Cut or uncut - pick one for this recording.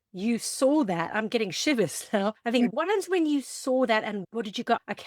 cut